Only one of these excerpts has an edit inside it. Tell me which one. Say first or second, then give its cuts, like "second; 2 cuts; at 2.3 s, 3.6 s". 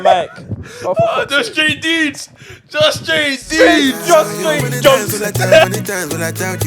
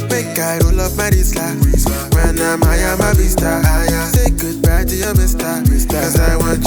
first; 1 cut; at 5.7 s